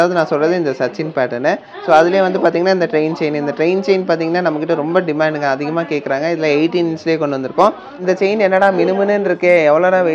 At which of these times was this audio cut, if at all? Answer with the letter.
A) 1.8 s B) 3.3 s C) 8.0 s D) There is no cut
C